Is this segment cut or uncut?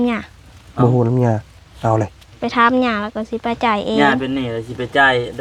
uncut